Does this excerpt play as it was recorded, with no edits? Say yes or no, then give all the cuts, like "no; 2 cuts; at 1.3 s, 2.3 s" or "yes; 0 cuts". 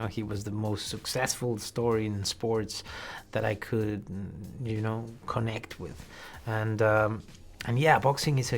yes; 0 cuts